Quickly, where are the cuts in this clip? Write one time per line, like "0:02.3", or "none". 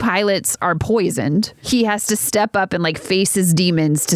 0:01.6